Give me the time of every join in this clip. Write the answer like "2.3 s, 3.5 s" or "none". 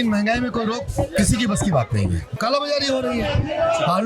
2.3 s